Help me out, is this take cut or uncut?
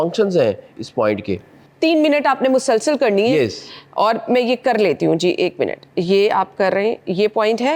uncut